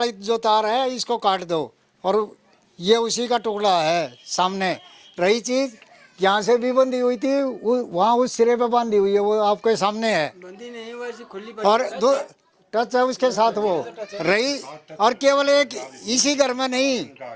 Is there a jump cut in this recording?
no; 0 cuts

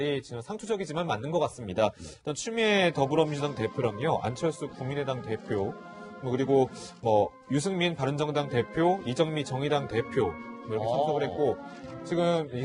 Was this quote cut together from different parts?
yes; 1 cut; at 3.5 s

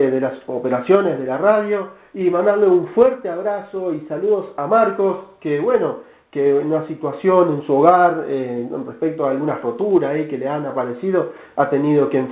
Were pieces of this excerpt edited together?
yes; 1 cut; at 11.0 s

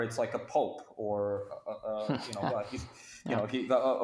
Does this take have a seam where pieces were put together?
no; 0 cuts

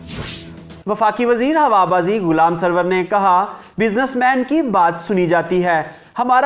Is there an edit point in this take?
no; 0 cuts

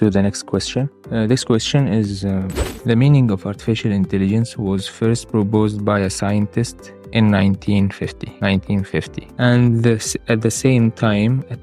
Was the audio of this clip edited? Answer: yes; 4 cuts; at 1.0 s, 2.6 s, 8.2 s, 9.2 s

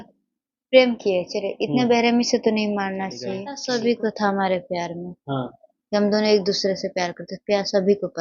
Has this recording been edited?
yes; 1 cut; at 3.5 s

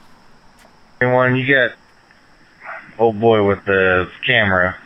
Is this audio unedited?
no; 1 cut; at 1.0 s

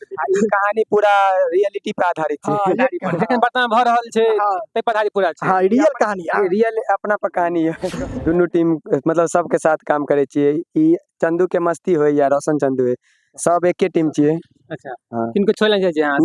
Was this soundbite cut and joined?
yes; 1 cut; at 7.9 s

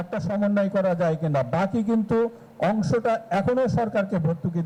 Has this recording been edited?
no; 0 cuts

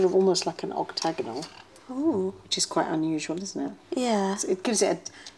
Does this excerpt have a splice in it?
no; 0 cuts

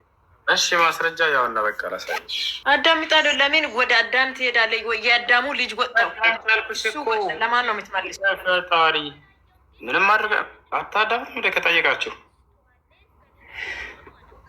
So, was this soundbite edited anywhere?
yes; 1 cut; at 2.4 s

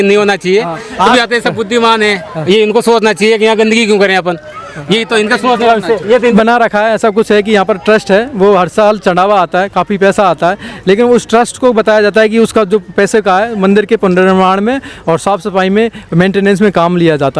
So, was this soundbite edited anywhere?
yes; 2 cuts; at 1.1 s, 6.3 s

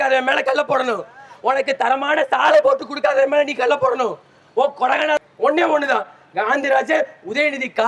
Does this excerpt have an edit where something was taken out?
yes; 1 cut; at 5.2 s

